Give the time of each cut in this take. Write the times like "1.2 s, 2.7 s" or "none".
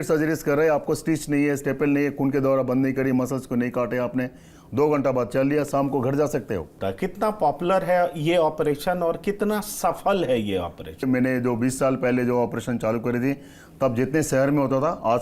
6.7 s, 11.0 s